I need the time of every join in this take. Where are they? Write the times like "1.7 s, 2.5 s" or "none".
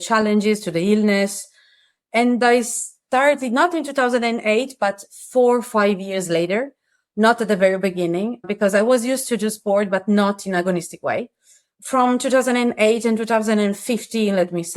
8.5 s, 11.7 s